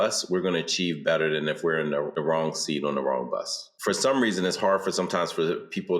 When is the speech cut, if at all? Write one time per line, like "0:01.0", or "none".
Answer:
0:02.1
0:03.7

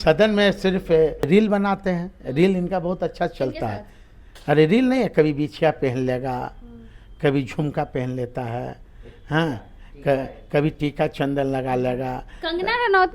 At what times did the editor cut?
0:01.3

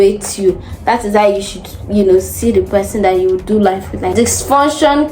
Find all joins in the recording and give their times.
0:04.1

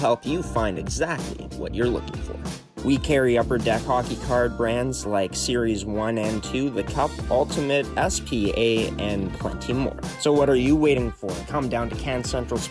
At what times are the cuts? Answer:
none

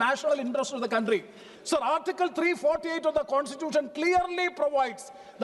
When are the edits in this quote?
0:01.5

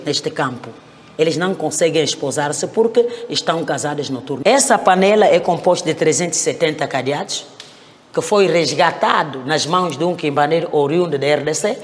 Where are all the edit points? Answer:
0:04.4

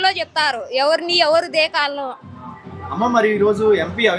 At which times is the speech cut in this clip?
none

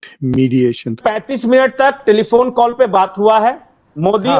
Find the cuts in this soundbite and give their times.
0:01.0

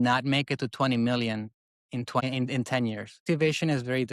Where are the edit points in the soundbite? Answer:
0:02.2
0:03.2

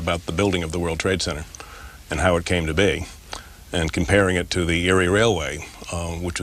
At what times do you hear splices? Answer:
0:03.9

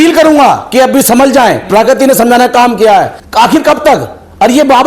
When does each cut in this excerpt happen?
0:03.2

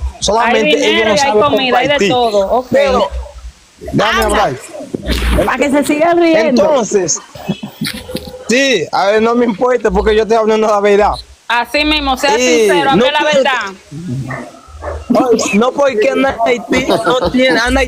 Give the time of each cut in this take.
0:03.7

